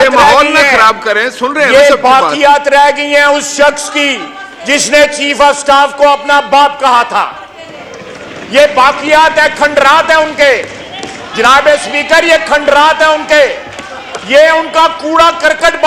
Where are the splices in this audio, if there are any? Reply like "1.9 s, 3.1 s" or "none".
none